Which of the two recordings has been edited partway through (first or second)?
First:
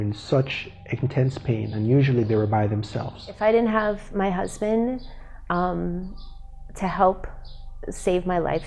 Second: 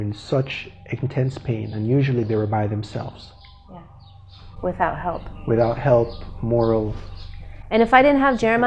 first